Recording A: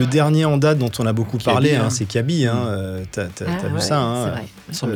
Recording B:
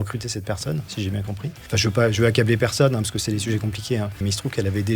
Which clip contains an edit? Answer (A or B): B